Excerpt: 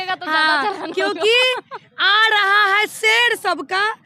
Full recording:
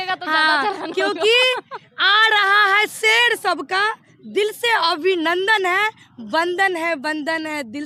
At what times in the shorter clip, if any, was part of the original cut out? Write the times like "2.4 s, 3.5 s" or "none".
none